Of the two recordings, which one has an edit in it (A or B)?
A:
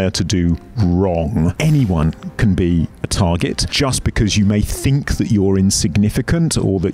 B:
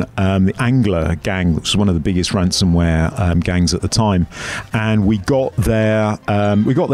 A